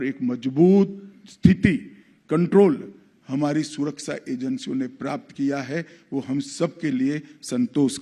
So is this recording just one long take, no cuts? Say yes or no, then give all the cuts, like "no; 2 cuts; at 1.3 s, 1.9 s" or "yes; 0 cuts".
yes; 0 cuts